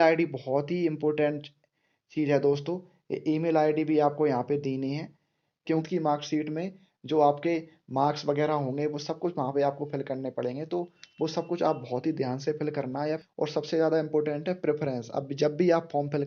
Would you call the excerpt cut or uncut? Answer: cut